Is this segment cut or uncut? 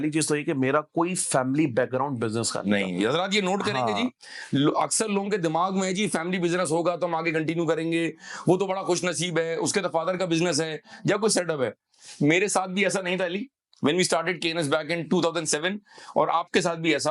uncut